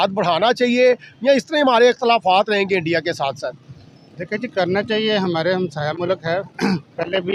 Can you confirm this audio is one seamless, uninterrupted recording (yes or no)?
yes